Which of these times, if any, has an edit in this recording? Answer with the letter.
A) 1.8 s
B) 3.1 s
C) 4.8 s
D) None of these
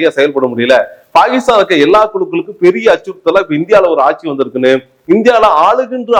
D